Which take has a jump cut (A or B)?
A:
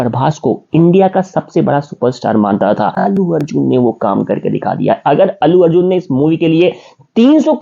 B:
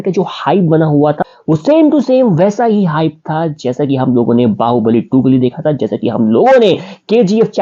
A